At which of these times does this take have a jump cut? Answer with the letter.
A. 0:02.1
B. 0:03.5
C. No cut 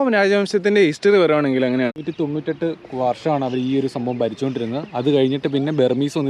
C